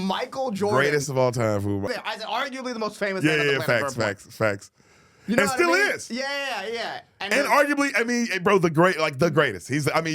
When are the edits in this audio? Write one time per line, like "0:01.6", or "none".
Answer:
0:01.9